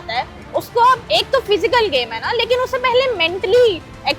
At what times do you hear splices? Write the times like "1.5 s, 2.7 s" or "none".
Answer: 1.0 s